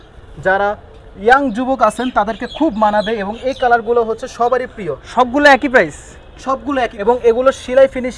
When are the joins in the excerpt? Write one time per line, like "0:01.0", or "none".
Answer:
0:07.0